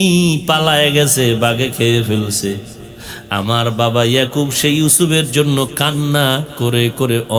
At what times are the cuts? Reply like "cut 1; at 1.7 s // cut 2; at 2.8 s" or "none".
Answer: none